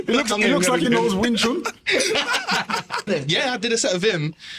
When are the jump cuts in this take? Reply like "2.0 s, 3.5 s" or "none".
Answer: 3.0 s